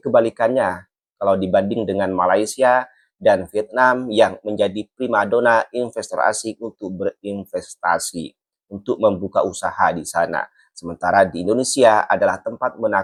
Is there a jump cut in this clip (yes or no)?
no